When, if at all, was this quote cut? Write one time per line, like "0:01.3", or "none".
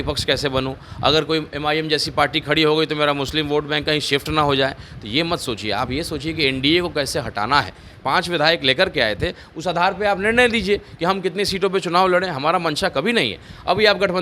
0:08.0